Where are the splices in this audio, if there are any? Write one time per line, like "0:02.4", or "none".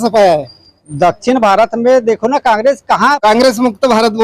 0:03.2